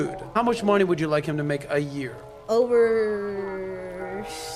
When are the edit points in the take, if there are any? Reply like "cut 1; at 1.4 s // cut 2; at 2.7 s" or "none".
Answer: none